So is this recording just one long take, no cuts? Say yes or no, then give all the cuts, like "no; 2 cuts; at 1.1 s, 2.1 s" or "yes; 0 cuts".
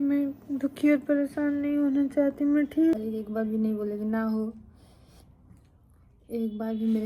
no; 1 cut; at 3.0 s